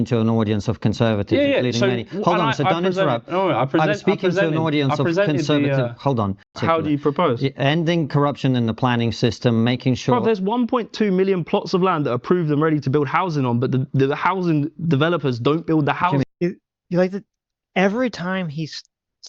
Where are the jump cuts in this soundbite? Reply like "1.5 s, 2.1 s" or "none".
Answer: 6.5 s